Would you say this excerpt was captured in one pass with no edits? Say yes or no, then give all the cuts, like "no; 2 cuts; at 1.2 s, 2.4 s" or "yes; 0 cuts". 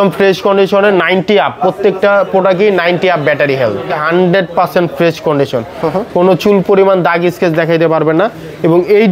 no; 1 cut; at 4.0 s